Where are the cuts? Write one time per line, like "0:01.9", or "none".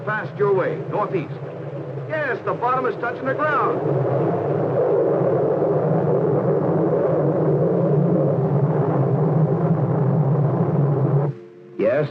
0:01.3